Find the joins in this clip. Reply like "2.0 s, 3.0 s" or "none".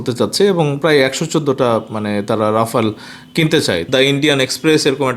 3.8 s

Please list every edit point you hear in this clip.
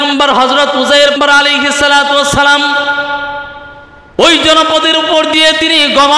1.2 s

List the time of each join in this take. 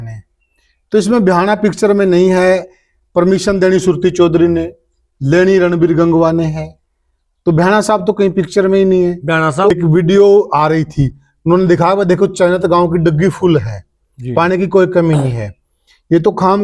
9.7 s

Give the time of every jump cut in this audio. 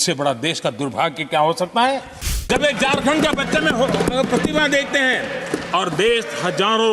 2.4 s

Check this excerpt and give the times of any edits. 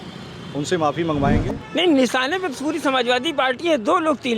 1.4 s

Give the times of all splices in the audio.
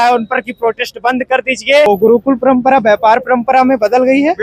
1.9 s

